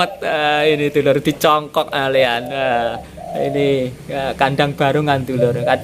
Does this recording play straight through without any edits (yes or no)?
yes